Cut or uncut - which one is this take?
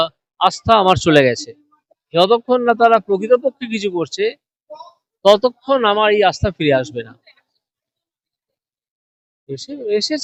uncut